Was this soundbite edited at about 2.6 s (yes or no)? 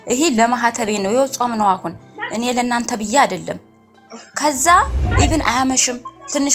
no